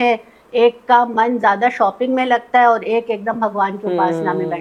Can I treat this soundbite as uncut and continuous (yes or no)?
yes